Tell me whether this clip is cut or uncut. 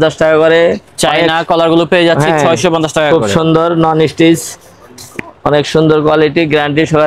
uncut